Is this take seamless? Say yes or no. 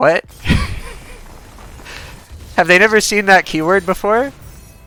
yes